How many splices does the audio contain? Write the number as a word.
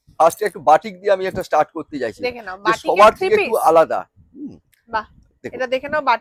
zero